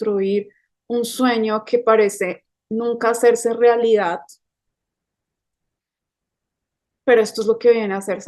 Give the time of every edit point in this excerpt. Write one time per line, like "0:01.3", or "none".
none